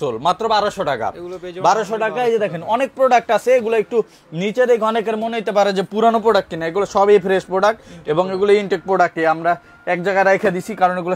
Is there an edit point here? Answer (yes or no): no